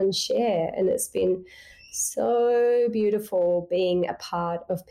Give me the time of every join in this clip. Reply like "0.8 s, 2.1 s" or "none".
none

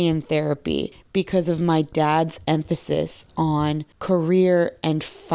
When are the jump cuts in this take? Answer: 1.0 s, 3.9 s

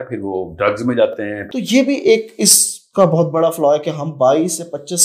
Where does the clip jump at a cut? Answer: 1.4 s

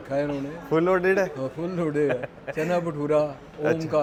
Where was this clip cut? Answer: none

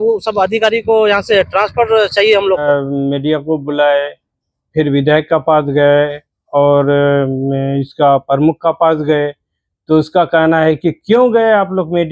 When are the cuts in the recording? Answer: 2.6 s

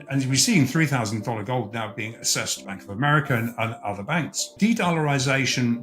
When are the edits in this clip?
2.7 s, 4.4 s

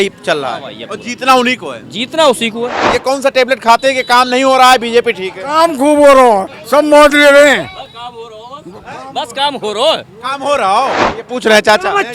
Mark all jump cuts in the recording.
2.8 s, 11.1 s

